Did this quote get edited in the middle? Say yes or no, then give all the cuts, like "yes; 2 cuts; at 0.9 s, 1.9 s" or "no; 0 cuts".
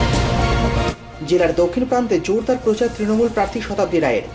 yes; 1 cut; at 1.1 s